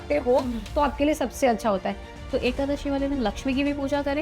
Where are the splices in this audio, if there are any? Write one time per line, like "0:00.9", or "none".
0:02.2